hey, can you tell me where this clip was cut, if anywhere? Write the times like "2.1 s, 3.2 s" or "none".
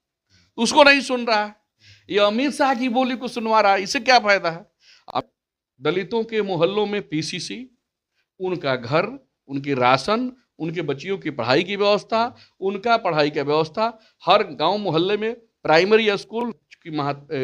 5.1 s, 16.5 s